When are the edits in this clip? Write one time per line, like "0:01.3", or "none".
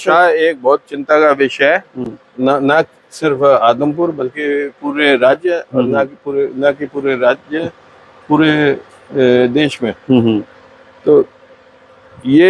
none